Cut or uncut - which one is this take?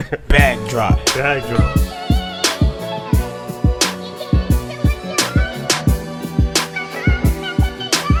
uncut